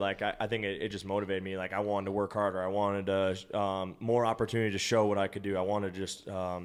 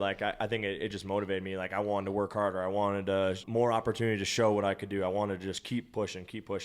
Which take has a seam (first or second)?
second